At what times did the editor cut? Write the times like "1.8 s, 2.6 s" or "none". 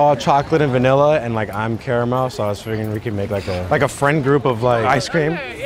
3.6 s, 4.9 s